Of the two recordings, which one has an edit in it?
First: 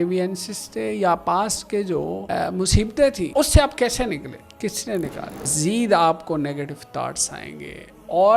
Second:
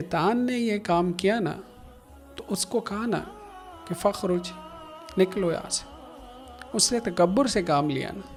first; 4 cuts; at 2.2 s, 3.2 s, 4.4 s, 5.5 s

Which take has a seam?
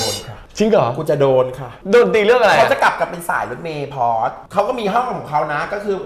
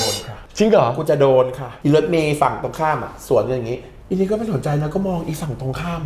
second; 2 cuts; at 1.7 s, 3.9 s

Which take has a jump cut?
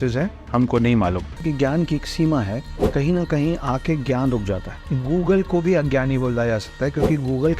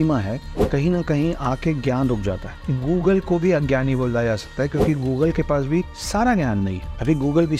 first; 1 cut; at 1.3 s

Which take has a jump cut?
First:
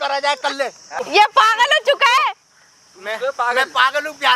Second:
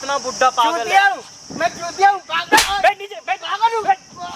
first; 1 cut; at 1.0 s

